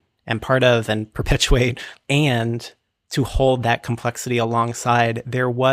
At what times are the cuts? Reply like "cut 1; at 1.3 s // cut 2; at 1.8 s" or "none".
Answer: cut 1; at 1.9 s